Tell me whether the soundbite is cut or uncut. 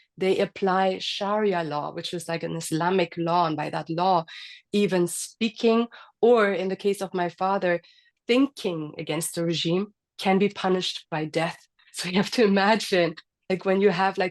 cut